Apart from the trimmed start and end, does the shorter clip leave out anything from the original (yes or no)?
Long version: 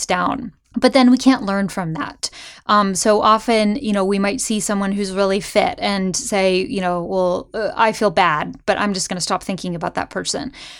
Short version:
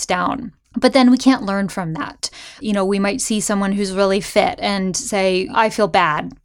yes